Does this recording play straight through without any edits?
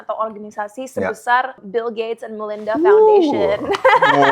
no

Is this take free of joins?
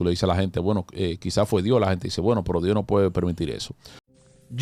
yes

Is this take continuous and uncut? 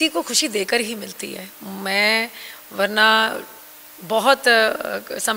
yes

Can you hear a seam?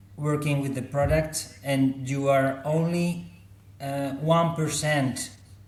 no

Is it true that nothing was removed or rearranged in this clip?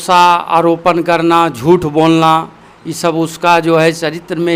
yes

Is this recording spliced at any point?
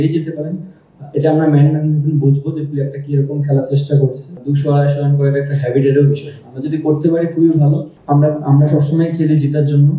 yes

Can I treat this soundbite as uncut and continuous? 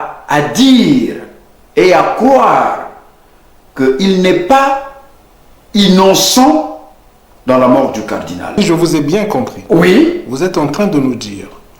no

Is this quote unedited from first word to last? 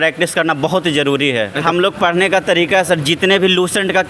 no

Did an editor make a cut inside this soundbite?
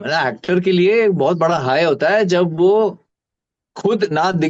no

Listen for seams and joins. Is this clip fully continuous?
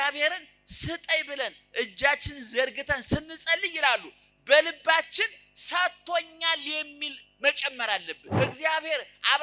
no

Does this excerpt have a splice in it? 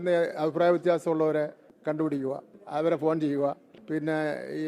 yes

